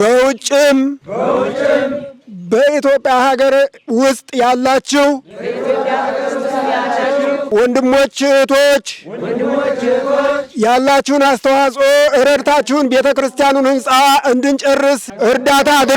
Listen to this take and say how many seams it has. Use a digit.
2